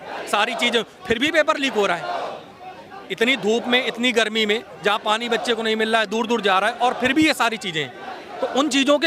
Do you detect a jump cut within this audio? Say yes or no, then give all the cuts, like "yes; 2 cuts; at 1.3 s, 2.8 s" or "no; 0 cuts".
no; 0 cuts